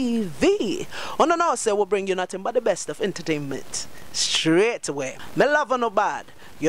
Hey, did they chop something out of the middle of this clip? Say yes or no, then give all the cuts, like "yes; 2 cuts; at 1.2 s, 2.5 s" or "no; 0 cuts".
yes; 1 cut; at 5.2 s